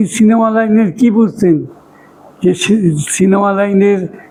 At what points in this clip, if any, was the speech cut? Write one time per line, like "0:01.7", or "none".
none